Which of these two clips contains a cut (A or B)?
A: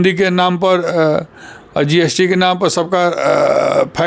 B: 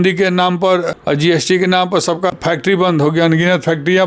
B